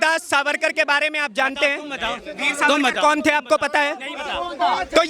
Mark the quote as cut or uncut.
uncut